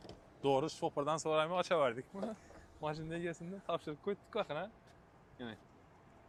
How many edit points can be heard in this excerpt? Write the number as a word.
zero